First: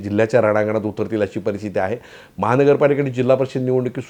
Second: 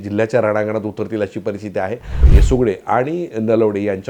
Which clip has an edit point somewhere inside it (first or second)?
second